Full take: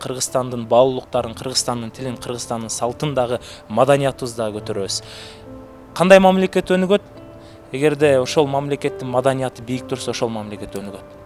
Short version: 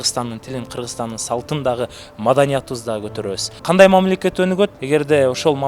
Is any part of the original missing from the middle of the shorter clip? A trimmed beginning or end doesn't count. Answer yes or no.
yes